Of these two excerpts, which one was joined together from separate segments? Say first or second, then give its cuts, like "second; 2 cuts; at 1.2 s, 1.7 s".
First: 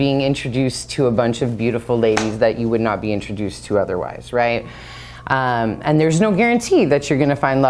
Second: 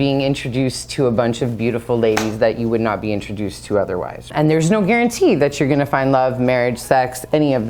second; 1 cut; at 4.3 s